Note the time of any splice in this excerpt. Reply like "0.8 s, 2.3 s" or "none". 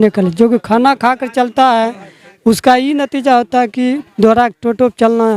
none